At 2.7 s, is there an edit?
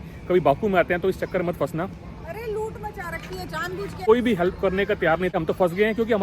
no; 2 cuts; at 4.0 s, 5.3 s

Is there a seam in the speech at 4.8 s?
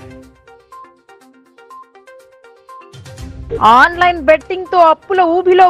no; 3 cuts; at 1.3 s, 2.1 s, 3.4 s

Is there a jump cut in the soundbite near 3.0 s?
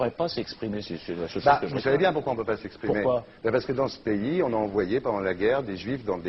yes; 1 cut; at 3.0 s

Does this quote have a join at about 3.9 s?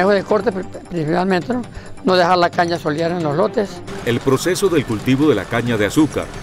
yes; 1 cut; at 3.9 s

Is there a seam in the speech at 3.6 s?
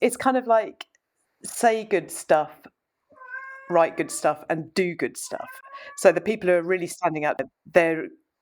no; 1 cut; at 7.4 s

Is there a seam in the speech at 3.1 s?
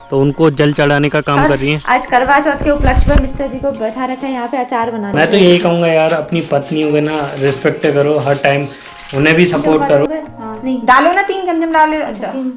no; 3 cuts; at 1.8 s, 5.1 s, 10.1 s

